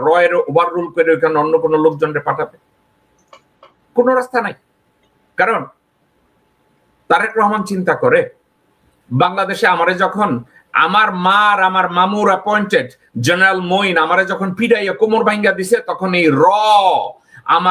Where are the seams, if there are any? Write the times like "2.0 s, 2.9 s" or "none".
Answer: none